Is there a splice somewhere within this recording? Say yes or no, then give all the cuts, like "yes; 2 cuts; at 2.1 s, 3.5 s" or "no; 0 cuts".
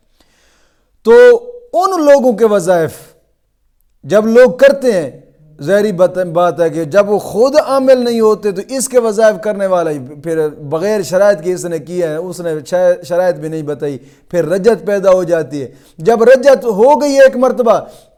no; 0 cuts